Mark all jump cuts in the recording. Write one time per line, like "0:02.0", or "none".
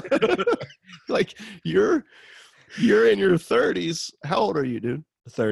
none